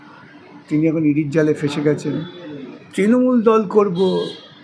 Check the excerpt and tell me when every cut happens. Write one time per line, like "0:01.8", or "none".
0:02.9